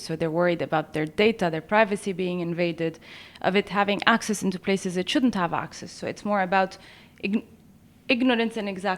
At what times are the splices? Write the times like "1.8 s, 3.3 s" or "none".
none